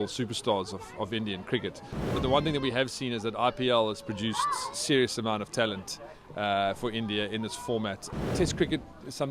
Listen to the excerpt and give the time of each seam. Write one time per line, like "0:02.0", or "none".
0:02.1
0:08.1